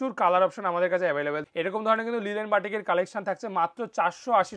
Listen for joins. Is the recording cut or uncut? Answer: cut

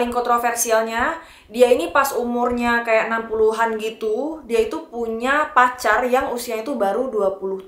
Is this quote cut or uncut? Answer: uncut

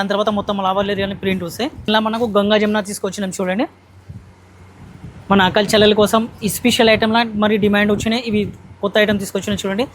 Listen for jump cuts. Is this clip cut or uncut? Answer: cut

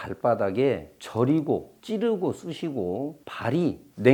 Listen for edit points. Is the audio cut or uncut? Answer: uncut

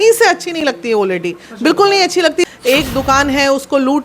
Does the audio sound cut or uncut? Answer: cut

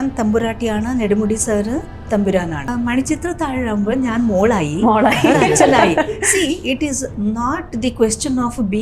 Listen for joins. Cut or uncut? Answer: cut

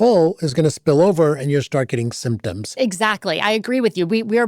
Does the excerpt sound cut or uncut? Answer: cut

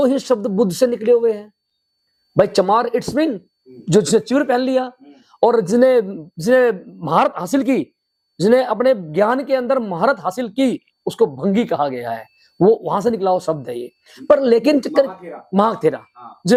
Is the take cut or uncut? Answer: uncut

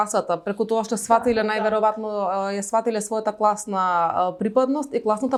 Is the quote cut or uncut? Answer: uncut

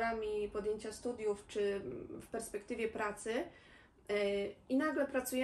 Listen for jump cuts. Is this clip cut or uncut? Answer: uncut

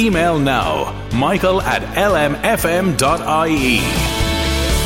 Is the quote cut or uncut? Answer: uncut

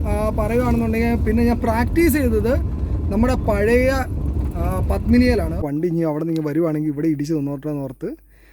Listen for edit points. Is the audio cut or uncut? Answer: cut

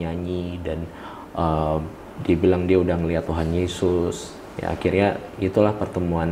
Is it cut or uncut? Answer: uncut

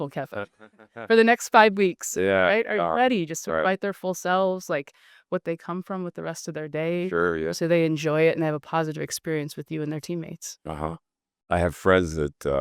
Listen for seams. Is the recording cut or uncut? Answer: cut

